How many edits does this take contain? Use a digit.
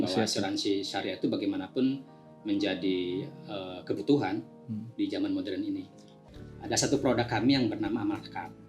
1